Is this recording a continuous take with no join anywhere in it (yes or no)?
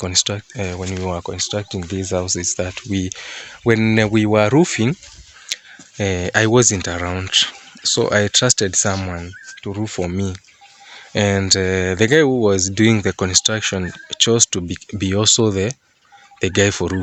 yes